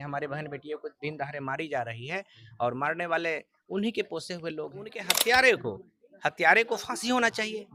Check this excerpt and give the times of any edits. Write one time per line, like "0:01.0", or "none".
0:05.1

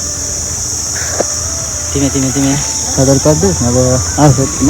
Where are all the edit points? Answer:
none

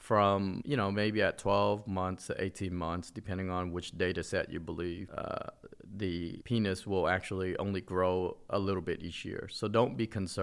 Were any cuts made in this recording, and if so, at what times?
none

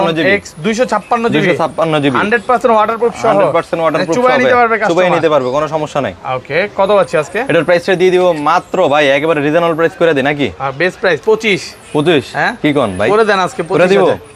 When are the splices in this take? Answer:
none

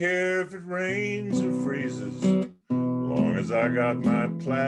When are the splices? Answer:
none

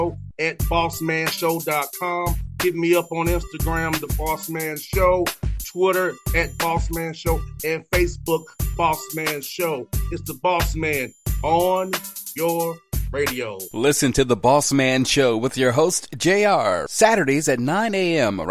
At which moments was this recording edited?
none

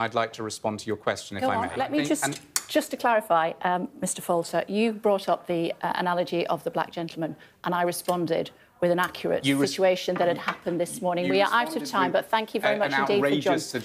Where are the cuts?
0:01.7

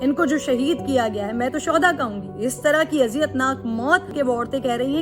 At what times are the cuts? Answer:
0:04.1

